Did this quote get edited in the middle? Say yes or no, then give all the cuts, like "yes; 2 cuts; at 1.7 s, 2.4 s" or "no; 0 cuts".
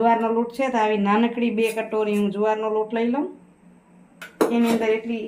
no; 0 cuts